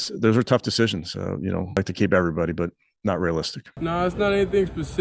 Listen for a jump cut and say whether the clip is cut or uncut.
cut